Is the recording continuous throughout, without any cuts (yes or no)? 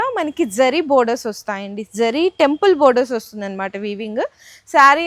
yes